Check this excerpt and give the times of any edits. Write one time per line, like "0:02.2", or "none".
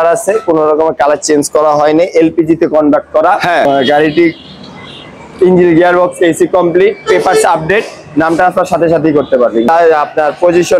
0:03.7
0:09.7